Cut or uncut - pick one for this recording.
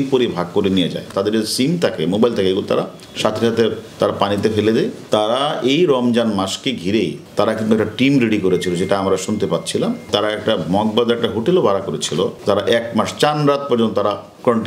cut